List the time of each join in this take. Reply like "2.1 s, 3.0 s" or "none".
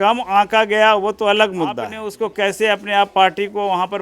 2.2 s